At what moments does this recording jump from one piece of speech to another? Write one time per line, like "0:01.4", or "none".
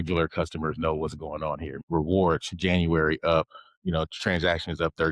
0:01.7